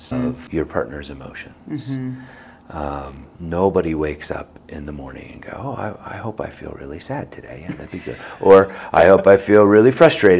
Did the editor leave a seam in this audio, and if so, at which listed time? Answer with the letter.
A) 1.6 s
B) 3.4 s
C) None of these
C